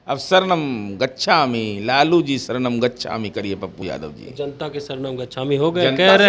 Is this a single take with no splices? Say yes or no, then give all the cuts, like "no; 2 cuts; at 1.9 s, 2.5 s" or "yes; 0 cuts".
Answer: yes; 0 cuts